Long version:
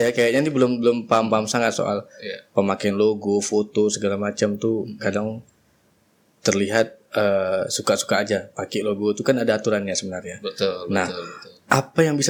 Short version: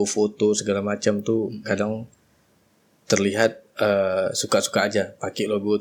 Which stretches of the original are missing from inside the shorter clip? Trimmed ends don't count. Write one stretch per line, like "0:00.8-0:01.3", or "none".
none